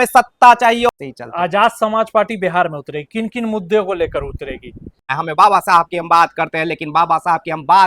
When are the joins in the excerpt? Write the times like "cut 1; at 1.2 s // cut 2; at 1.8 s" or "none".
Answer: cut 1; at 0.9 s // cut 2; at 5.2 s